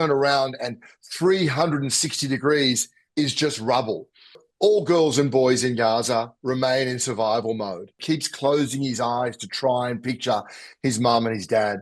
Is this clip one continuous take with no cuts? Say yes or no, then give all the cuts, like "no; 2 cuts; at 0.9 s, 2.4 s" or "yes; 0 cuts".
no; 2 cuts; at 4.4 s, 8.0 s